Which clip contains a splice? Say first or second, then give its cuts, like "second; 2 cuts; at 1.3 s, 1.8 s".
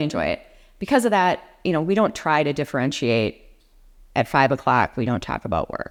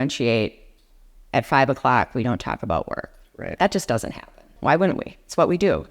second; 1 cut; at 4.4 s